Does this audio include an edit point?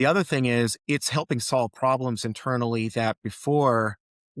no; 0 cuts

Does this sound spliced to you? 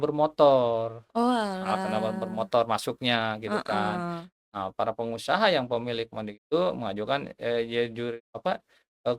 no; 0 cuts

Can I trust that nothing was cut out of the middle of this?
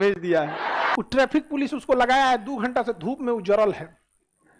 no; 1 cut; at 0.9 s

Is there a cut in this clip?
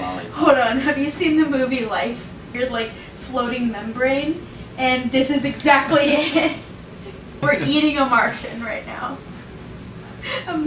yes; 2 cuts; at 2.5 s, 7.4 s

